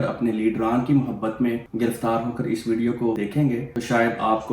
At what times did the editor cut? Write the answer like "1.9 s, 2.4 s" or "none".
1.7 s, 3.3 s